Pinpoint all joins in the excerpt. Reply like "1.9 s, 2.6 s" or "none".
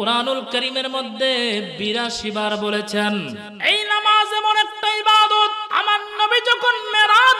3.5 s, 5.6 s